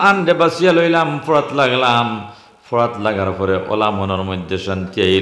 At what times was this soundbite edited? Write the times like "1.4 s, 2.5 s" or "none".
none